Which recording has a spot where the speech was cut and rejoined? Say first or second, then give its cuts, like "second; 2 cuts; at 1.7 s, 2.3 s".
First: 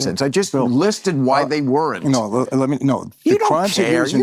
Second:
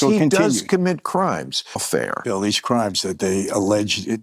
second; 1 cut; at 1.8 s